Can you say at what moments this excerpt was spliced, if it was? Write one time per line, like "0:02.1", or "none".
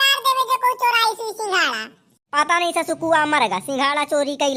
none